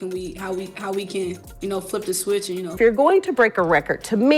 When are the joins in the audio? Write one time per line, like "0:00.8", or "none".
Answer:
0:02.7